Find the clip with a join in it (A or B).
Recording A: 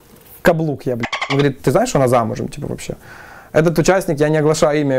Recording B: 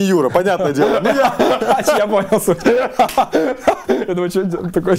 A